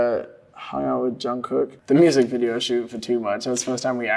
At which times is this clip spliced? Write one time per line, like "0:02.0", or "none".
0:01.8